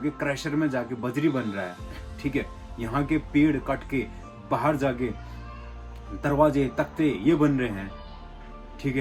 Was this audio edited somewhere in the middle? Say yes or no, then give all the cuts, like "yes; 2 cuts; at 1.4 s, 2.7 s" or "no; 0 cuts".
no; 0 cuts